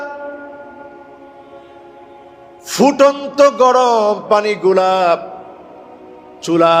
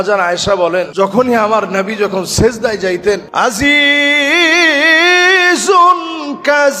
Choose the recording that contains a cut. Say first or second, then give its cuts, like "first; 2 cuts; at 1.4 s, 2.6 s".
second; 2 cuts; at 0.9 s, 3.3 s